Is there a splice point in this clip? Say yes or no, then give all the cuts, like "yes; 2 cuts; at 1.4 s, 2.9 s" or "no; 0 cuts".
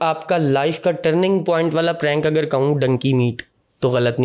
no; 0 cuts